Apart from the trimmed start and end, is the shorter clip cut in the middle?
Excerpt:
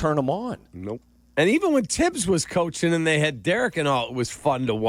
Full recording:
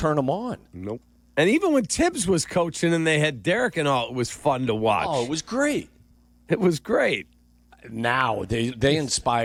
no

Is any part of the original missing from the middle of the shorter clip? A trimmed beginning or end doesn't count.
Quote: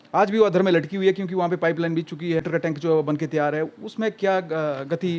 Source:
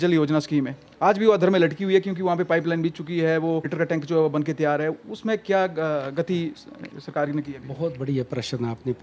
yes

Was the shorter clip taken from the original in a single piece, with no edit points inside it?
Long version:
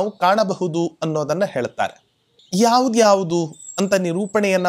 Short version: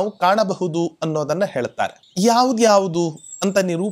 no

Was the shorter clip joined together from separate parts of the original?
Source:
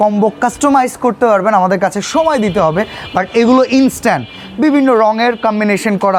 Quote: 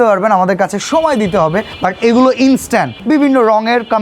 yes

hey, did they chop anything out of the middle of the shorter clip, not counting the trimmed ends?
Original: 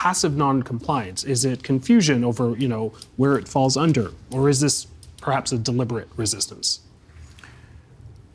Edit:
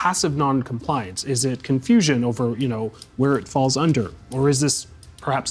no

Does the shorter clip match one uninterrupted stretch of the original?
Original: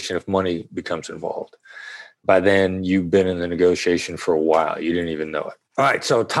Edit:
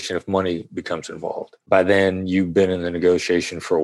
no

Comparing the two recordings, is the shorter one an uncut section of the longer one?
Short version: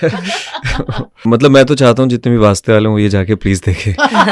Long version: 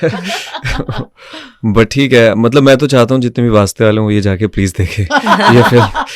no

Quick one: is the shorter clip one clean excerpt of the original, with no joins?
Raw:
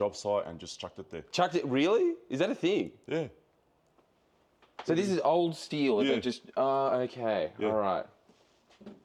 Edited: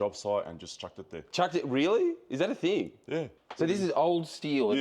no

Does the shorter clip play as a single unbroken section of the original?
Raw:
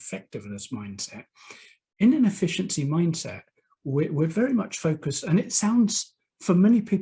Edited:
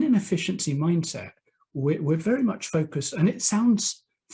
yes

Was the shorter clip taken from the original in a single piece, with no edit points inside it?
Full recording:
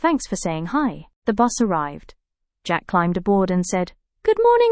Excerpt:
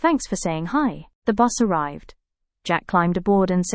yes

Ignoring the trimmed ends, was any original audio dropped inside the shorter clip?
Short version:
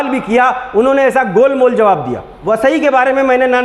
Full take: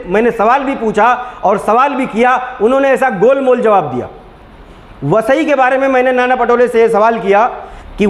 yes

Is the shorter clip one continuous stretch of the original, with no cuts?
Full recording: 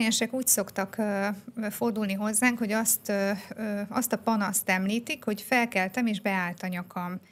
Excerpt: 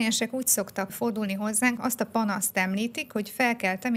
no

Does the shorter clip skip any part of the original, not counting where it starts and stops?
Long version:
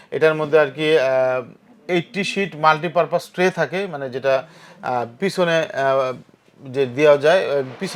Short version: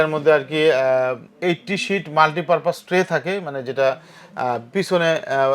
yes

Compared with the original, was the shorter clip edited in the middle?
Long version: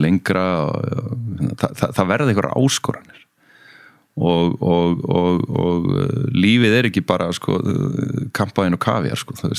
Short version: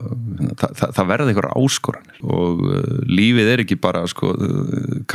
yes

